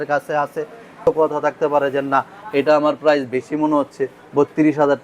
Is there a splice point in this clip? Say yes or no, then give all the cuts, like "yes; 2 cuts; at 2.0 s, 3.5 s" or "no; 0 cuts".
yes; 1 cut; at 1.0 s